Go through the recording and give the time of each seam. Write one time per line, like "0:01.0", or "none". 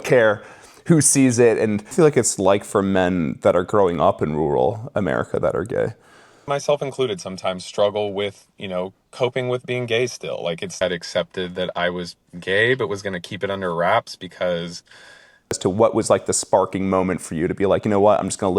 0:01.9
0:06.4
0:10.8
0:15.6